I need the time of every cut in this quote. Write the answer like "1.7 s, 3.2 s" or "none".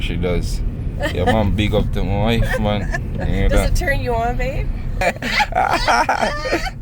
5.0 s